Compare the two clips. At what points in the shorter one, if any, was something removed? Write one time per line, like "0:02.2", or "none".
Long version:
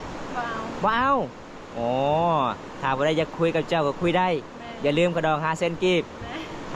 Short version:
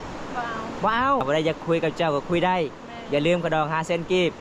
0:01.2